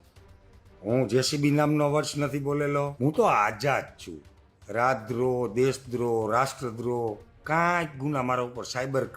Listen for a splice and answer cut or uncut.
cut